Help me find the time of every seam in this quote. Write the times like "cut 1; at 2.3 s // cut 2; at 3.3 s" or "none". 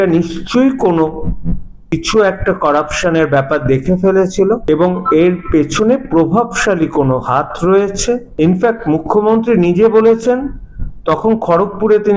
cut 1; at 1.9 s // cut 2; at 4.6 s // cut 3; at 8.3 s

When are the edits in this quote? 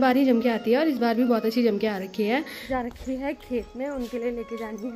cut 1; at 2.5 s

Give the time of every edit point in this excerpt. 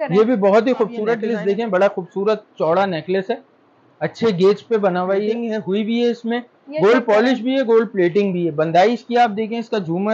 cut 1; at 1.2 s // cut 2; at 5.4 s

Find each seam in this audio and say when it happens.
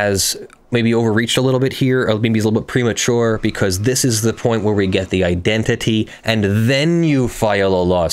none

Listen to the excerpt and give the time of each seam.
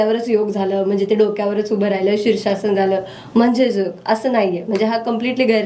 none

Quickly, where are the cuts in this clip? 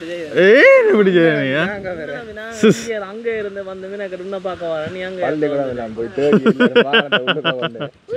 none

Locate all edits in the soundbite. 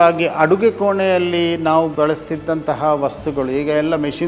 cut 1; at 1.9 s

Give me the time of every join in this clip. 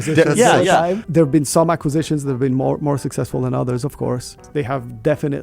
cut 1; at 1.0 s // cut 2; at 4.4 s

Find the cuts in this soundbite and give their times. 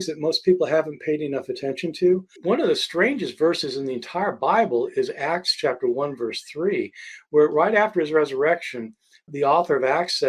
cut 1; at 2.3 s // cut 2; at 9.3 s

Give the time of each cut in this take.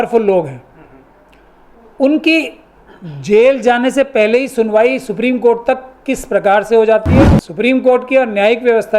cut 1; at 7.2 s

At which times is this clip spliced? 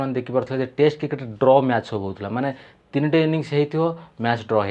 none

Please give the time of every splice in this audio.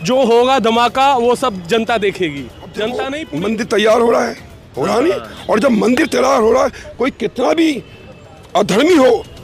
cut 1; at 3.2 s

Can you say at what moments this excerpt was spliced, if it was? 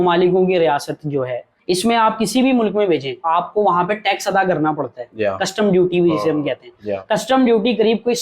cut 1; at 1.5 s // cut 2; at 3.2 s

